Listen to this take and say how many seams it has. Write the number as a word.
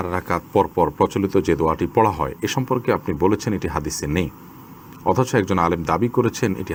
zero